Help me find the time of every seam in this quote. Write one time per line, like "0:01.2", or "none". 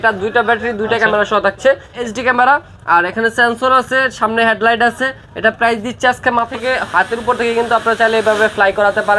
0:01.9
0:06.5